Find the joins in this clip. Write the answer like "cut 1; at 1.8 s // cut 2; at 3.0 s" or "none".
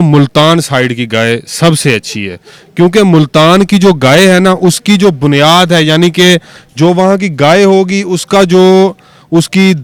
none

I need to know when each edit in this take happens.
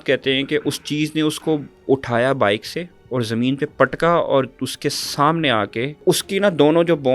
cut 1; at 2.9 s // cut 2; at 6.0 s

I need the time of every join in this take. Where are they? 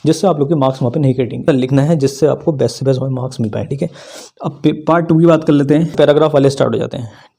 cut 1; at 1.4 s // cut 2; at 5.9 s

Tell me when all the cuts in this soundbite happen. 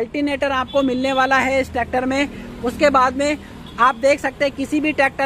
none

